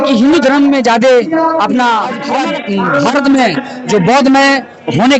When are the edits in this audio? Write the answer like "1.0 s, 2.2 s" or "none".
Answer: 2.3 s